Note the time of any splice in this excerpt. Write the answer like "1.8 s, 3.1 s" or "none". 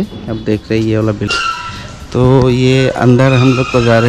1.3 s